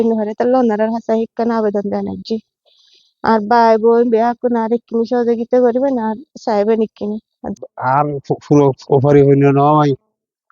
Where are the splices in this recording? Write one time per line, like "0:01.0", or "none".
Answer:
0:07.5